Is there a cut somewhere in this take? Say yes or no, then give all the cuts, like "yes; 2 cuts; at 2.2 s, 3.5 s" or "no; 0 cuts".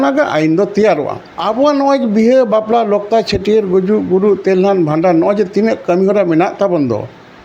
yes; 1 cut; at 1.2 s